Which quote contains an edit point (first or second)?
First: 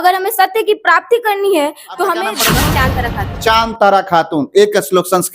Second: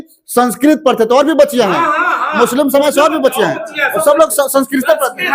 first